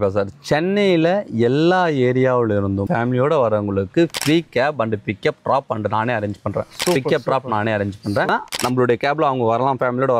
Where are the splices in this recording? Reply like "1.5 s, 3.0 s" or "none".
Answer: 8.3 s